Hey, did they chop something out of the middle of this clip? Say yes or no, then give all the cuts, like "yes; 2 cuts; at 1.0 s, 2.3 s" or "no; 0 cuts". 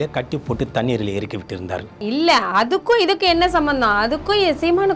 yes; 1 cut; at 2.0 s